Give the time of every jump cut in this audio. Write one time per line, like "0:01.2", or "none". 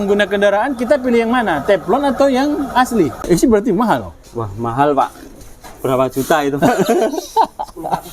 0:03.2